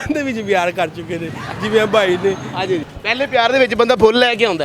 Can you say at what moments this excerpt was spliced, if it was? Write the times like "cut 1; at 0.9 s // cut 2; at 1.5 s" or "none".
cut 1; at 2.9 s